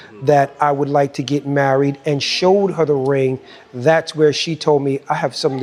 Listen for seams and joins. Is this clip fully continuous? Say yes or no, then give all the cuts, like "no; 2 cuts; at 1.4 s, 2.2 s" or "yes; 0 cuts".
yes; 0 cuts